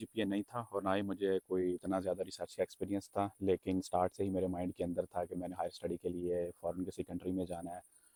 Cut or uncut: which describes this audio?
uncut